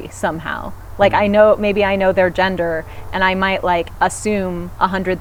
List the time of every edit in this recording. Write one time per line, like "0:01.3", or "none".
none